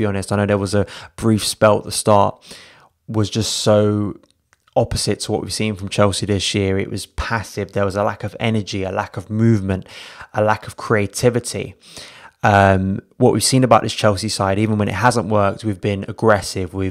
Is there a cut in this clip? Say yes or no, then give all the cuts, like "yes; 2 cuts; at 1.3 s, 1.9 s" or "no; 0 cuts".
no; 0 cuts